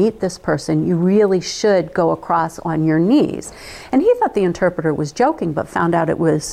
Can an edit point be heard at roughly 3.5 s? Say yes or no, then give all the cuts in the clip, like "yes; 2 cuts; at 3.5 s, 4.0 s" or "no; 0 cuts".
no; 0 cuts